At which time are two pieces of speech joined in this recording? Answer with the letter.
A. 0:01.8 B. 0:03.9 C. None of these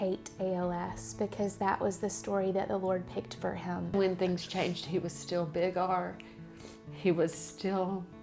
B